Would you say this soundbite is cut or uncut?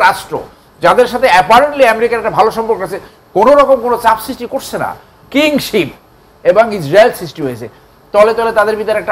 cut